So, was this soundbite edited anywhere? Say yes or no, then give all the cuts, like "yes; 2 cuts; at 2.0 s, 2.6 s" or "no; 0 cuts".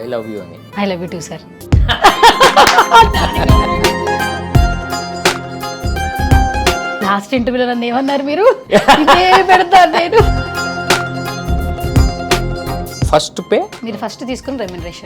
no; 0 cuts